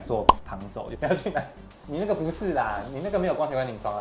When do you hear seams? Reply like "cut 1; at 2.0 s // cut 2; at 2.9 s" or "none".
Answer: cut 1; at 0.9 s